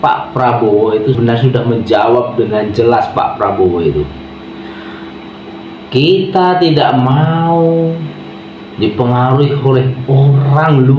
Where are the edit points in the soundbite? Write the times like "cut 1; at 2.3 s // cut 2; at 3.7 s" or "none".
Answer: cut 1; at 1.2 s

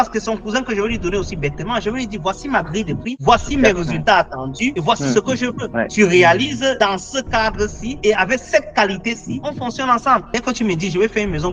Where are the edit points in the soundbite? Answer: cut 1; at 10.3 s

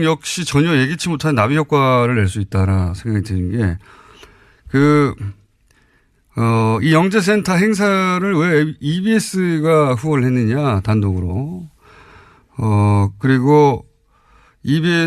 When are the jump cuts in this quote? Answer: cut 1; at 10.1 s

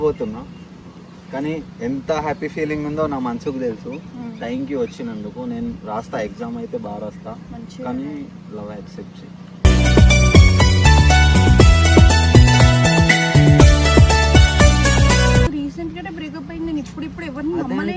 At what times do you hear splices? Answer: cut 1; at 15.5 s

